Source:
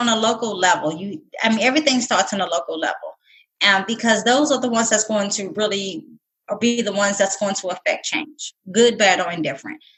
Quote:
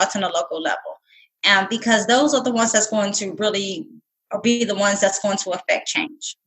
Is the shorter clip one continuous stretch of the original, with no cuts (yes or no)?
yes